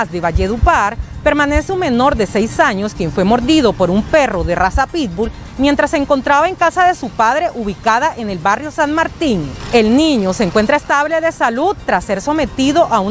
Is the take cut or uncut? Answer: uncut